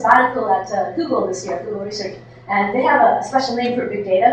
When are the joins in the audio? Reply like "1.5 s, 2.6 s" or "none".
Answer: 1.9 s

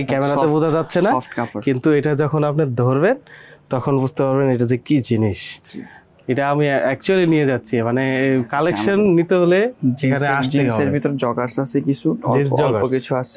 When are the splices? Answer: none

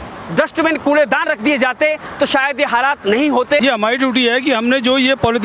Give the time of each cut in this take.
3.6 s

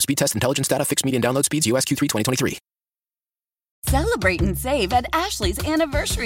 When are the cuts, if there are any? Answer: 3.8 s

